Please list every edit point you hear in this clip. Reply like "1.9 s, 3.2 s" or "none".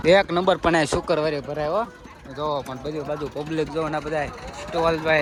none

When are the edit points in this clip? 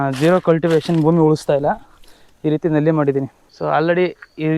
3.4 s

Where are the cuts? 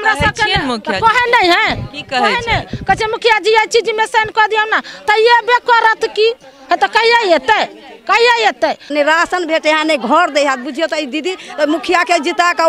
8.9 s

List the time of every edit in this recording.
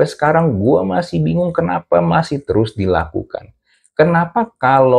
none

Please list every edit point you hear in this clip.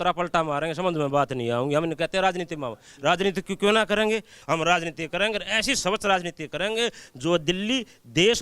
4.3 s

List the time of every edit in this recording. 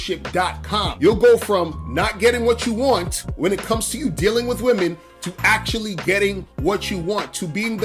0.9 s

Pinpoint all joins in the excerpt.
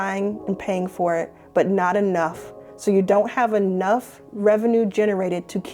none

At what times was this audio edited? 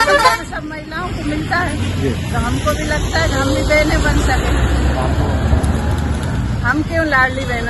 none

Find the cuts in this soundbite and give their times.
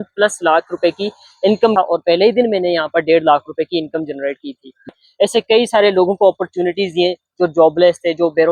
1.7 s, 4.9 s

